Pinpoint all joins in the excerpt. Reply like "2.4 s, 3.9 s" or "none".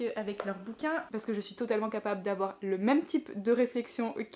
1.1 s

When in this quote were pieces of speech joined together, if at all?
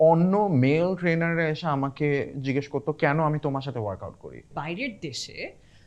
4.5 s

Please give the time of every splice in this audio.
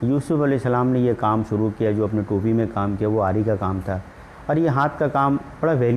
none

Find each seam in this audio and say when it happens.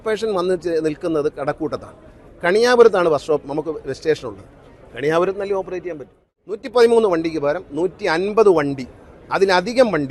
6.6 s

